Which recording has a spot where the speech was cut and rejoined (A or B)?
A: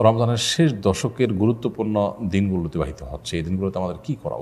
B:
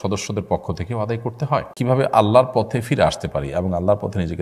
B